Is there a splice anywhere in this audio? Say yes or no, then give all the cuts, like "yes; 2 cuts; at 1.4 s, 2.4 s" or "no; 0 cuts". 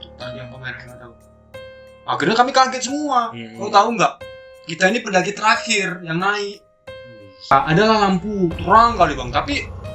yes; 1 cut; at 7.5 s